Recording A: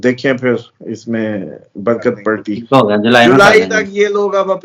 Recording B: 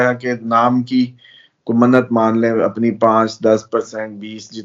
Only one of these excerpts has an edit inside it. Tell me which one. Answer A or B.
A